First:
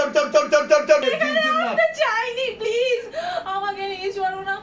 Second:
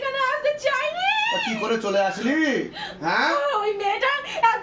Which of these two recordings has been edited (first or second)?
first